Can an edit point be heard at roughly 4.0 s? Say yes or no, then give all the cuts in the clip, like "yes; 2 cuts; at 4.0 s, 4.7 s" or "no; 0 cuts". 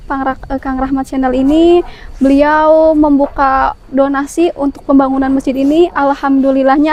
no; 0 cuts